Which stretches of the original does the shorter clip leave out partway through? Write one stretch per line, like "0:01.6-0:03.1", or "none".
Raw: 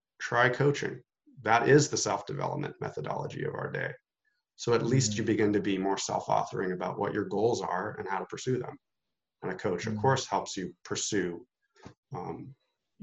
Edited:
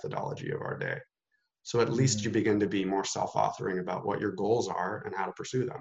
none